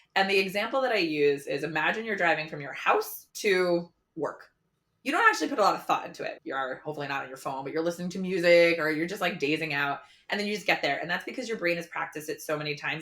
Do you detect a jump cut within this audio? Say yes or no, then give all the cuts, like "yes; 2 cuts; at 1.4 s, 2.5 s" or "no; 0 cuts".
yes; 2 cuts; at 4.0 s, 6.3 s